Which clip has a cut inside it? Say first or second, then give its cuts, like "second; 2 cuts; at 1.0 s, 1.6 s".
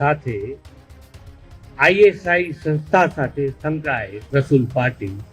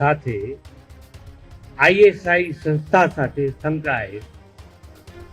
first; 1 cut; at 4.1 s